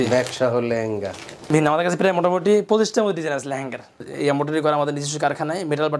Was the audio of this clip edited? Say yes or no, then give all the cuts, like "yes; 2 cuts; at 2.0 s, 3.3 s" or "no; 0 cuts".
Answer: yes; 2 cuts; at 1.5 s, 4.1 s